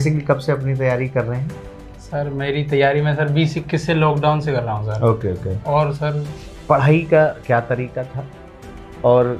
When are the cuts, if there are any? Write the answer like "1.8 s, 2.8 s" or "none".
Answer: 6.5 s